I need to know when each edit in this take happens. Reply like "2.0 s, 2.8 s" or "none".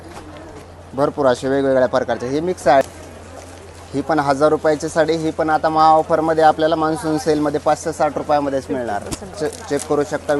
2.8 s, 9.4 s